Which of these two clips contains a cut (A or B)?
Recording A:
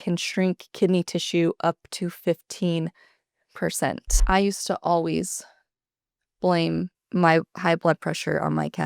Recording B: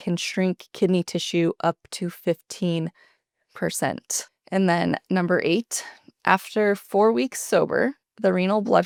A